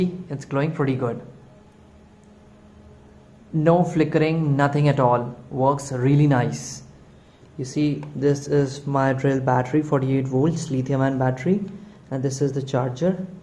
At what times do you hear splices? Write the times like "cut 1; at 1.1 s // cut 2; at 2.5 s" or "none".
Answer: cut 1; at 7.0 s